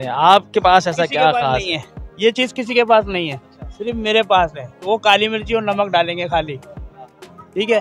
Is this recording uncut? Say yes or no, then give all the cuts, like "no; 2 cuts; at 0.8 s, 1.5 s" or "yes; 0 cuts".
yes; 0 cuts